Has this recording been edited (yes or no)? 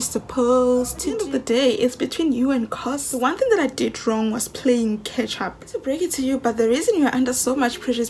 yes